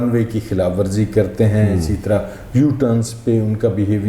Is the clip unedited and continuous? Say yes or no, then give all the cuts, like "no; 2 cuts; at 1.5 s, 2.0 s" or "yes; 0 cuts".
yes; 0 cuts